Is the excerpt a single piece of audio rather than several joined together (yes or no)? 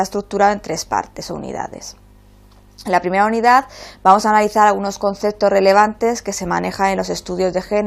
yes